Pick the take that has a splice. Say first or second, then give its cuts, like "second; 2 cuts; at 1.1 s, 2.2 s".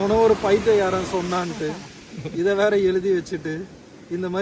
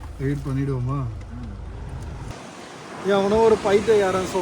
second; 1 cut; at 2.3 s